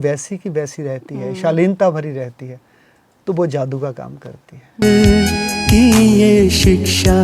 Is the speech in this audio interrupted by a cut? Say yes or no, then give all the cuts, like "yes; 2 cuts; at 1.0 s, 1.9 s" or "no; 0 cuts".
yes; 1 cut; at 4.8 s